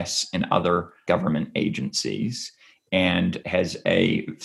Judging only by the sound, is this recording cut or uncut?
cut